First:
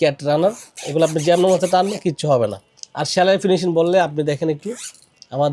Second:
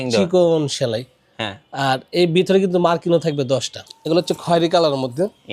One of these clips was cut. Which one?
second; 1 cut; at 3.9 s

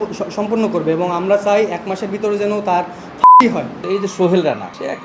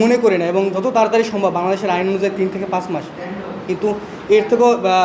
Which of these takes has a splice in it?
first; 1 cut; at 3.7 s

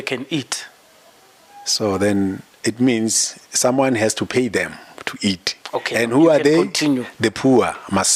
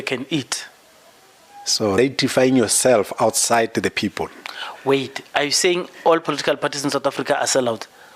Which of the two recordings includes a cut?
second; 1 cut; at 2.0 s

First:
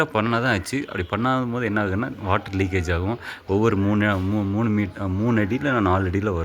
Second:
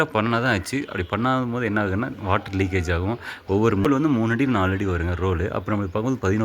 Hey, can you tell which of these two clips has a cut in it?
second; 1 cut; at 3.9 s

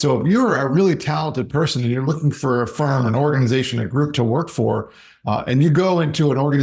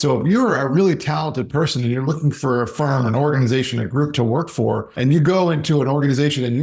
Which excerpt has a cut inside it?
second; 1 cut; at 4.9 s

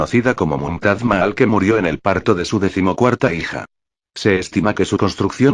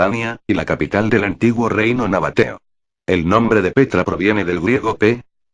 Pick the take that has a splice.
first; 1 cut; at 1.4 s

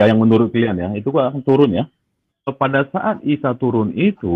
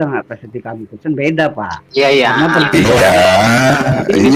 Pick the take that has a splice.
first; 1 cut; at 2.5 s

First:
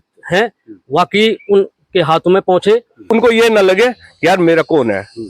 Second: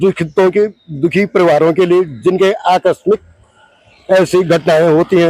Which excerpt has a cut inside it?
first; 1 cut; at 2.9 s

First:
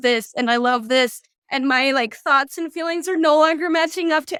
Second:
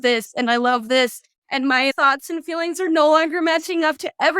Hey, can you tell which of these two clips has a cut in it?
second; 1 cut; at 1.9 s

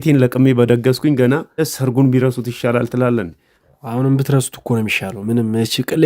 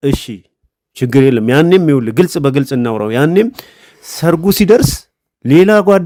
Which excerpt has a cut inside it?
first; 1 cut; at 1.7 s

